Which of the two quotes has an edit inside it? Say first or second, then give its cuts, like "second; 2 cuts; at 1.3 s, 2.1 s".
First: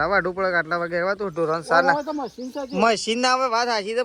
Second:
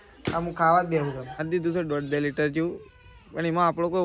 second; 1 cut; at 1.4 s